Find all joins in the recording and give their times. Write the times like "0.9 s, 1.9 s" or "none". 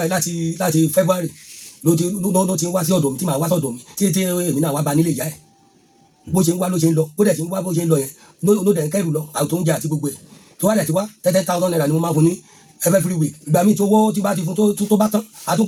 none

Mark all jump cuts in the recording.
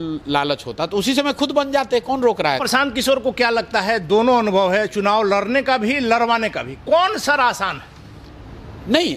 2.6 s

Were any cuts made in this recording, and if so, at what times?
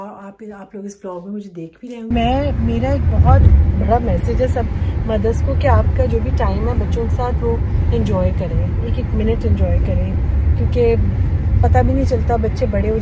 2.1 s

